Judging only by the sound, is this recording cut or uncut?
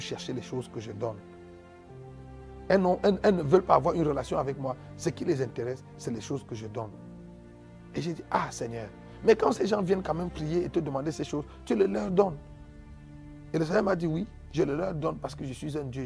uncut